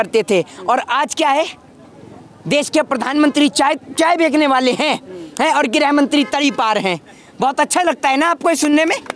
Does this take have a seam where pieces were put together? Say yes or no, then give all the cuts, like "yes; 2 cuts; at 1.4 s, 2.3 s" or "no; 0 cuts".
no; 0 cuts